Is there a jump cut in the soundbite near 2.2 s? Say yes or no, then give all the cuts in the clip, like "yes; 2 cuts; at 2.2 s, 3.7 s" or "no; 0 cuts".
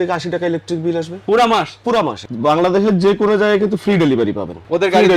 yes; 1 cut; at 2.2 s